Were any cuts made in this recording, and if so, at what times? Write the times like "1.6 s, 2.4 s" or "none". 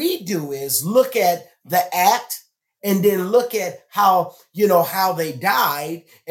none